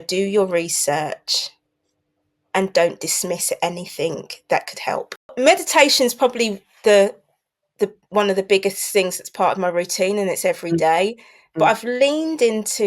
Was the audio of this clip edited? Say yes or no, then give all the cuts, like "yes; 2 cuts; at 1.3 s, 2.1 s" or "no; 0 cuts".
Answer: yes; 1 cut; at 5.3 s